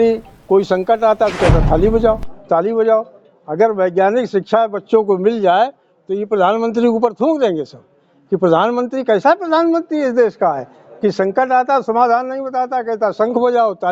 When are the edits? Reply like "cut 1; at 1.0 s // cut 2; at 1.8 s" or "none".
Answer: none